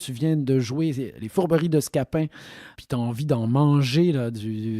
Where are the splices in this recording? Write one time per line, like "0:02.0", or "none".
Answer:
0:02.7